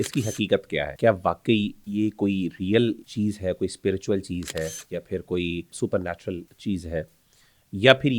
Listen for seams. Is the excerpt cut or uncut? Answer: cut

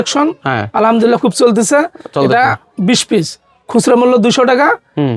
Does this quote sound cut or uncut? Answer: uncut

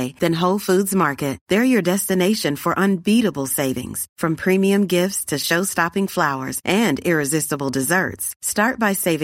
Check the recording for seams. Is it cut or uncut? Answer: uncut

